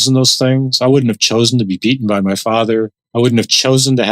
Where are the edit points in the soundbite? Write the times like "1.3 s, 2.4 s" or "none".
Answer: 3.0 s